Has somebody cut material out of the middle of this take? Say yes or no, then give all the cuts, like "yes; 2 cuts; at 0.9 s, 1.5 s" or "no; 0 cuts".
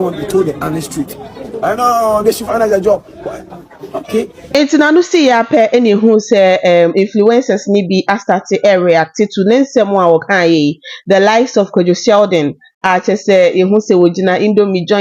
no; 0 cuts